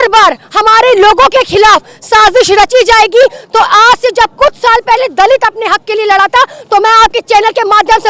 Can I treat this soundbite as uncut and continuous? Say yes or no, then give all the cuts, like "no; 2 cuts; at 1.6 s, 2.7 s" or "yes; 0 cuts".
yes; 0 cuts